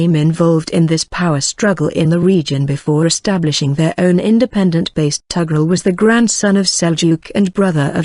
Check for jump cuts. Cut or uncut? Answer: uncut